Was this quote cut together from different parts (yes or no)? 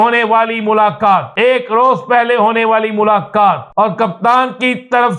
yes